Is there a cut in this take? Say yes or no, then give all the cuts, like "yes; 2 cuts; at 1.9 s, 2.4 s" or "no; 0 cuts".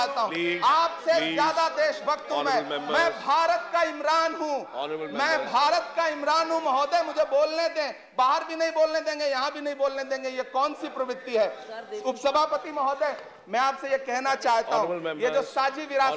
no; 0 cuts